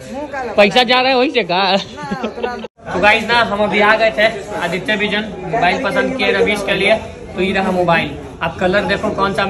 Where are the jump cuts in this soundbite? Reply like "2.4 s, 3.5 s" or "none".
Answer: 2.6 s